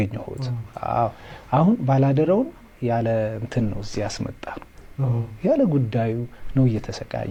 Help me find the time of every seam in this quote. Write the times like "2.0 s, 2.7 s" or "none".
none